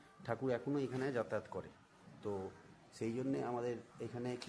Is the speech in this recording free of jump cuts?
yes; 0 cuts

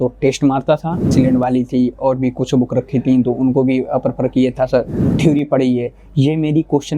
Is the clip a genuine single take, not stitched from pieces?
no; 2 cuts; at 1.1 s, 5.0 s

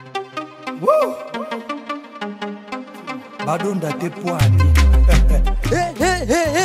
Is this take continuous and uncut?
yes; 0 cuts

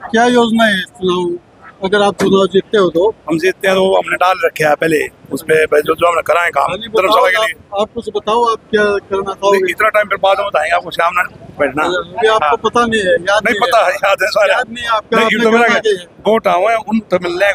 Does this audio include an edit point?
no; 0 cuts

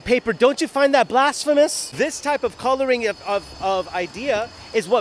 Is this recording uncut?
no; 1 cut; at 1.8 s

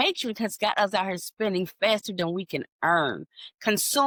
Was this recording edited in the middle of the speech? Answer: no; 0 cuts

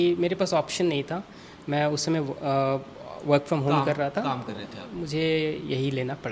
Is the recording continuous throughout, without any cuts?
yes; 0 cuts

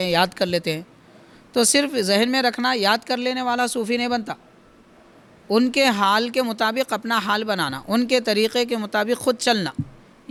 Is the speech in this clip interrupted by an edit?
no; 0 cuts

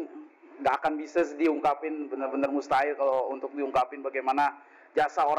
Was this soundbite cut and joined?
no; 0 cuts

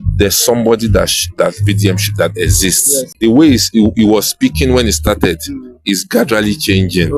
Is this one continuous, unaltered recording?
no; 1 cut; at 3.1 s

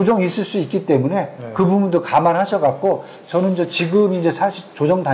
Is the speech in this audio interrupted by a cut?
no; 0 cuts

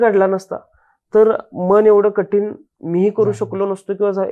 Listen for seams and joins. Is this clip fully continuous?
yes; 0 cuts

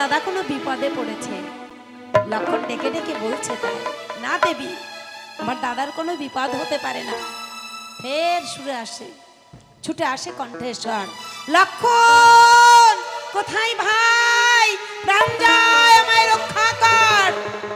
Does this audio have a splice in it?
no; 0 cuts

